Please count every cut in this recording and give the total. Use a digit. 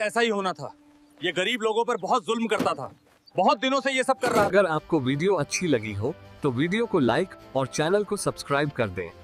0